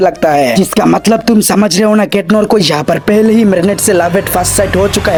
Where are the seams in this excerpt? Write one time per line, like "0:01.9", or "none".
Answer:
none